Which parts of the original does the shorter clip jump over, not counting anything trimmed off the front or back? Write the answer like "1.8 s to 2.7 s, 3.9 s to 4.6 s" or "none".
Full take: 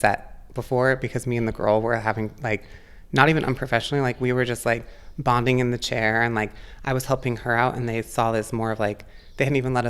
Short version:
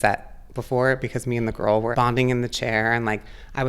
1.9 s to 5.2 s